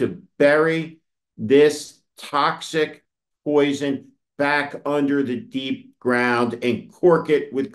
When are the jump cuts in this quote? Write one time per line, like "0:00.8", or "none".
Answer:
none